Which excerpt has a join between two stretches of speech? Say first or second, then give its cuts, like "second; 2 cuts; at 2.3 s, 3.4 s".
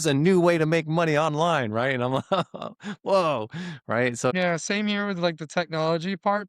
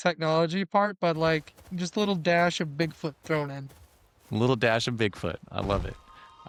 first; 1 cut; at 4.3 s